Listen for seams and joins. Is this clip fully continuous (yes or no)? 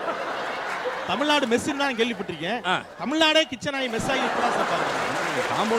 yes